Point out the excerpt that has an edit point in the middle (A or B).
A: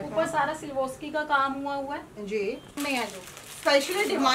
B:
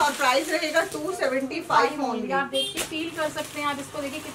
A